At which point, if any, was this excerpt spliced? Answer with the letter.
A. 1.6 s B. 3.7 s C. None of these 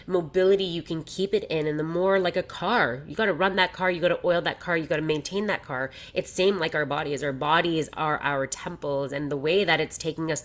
C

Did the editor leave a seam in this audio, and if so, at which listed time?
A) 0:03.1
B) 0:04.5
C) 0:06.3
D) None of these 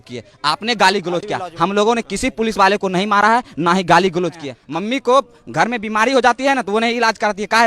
B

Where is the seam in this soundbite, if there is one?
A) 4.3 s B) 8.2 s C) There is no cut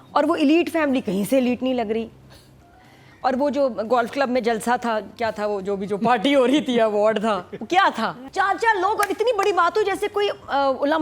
B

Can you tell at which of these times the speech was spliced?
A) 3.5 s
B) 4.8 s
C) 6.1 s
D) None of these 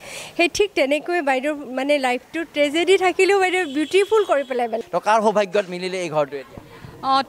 B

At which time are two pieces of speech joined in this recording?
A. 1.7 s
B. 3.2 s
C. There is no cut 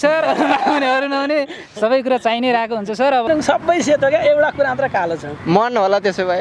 B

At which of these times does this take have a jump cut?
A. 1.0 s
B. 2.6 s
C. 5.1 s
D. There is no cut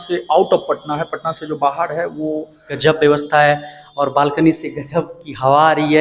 B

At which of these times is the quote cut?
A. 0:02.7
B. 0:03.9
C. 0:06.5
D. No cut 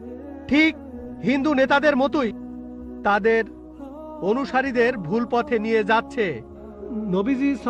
C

